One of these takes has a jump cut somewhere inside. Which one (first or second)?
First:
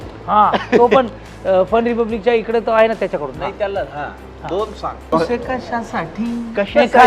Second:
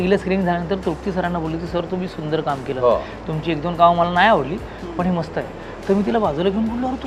first